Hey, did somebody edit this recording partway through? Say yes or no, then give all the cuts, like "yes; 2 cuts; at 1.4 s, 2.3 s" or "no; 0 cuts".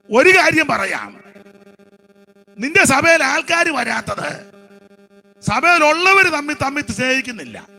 no; 0 cuts